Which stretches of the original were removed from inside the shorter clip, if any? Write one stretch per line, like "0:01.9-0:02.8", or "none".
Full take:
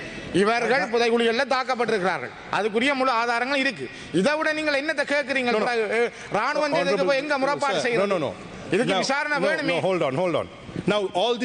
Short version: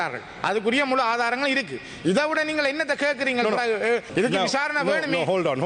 0:06.2-0:08.6